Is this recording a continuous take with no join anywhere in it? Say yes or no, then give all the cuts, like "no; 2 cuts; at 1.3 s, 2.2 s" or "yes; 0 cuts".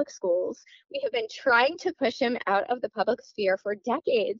yes; 0 cuts